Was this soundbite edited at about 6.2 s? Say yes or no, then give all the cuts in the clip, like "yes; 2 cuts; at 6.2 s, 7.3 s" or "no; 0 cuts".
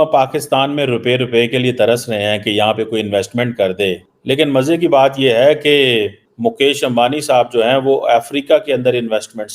yes; 2 cuts; at 4.1 s, 6.2 s